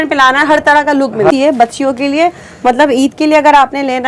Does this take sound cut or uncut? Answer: cut